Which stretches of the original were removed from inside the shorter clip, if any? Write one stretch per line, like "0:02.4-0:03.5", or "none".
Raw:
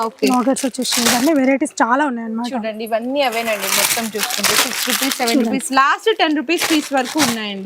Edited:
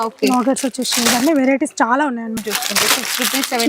0:02.4-0:04.1